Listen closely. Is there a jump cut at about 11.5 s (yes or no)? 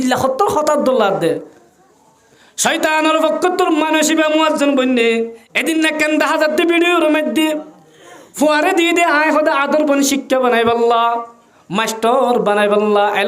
no